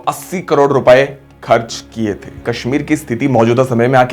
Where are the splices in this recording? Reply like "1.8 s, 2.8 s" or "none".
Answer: 2.4 s

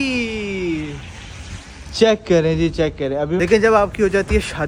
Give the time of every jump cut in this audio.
3.4 s

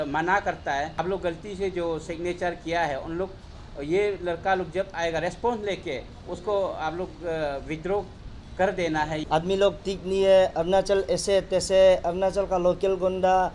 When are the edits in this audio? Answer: 0.9 s, 9.2 s

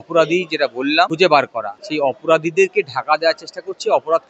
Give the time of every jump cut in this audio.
1.1 s, 1.8 s

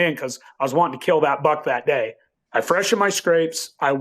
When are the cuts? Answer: 2.2 s

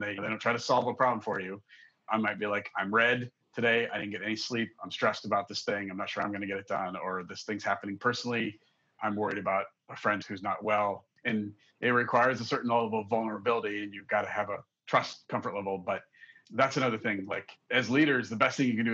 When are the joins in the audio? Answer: 2.0 s, 9.0 s, 17.5 s

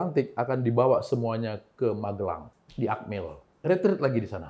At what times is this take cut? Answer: 2.6 s

